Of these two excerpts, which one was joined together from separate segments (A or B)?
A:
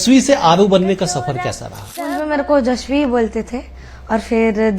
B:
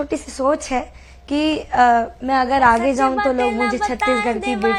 A